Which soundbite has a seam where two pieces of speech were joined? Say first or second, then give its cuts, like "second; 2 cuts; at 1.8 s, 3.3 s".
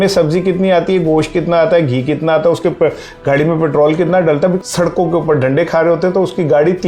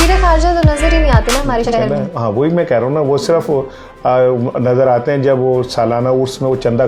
first; 1 cut; at 4.6 s